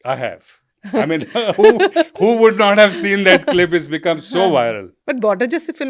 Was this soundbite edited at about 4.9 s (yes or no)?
yes